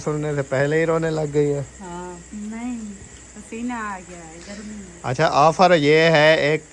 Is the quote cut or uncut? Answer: uncut